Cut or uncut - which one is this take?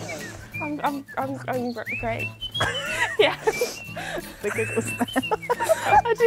uncut